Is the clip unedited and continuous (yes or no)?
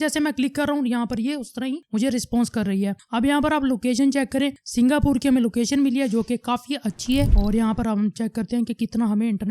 no